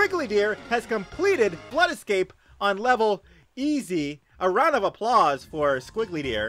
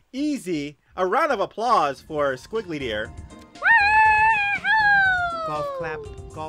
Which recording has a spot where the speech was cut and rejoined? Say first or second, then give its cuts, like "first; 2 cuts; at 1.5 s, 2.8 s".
first; 1 cut; at 1.6 s